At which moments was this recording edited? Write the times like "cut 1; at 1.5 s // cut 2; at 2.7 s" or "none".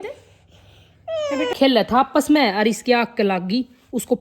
cut 1; at 1.5 s